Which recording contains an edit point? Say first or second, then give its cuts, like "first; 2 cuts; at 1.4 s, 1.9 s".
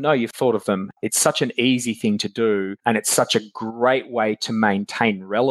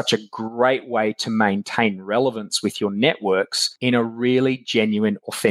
first; 1 cut; at 0.9 s